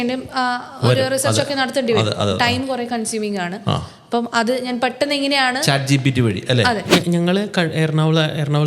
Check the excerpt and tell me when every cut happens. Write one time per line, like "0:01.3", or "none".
0:06.9